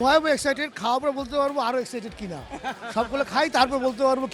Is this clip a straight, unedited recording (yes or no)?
yes